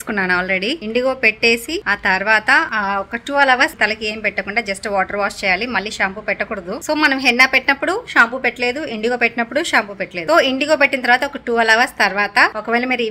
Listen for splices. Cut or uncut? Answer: uncut